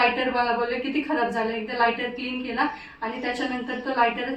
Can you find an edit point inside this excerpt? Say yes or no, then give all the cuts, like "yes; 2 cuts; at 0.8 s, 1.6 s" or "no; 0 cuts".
no; 0 cuts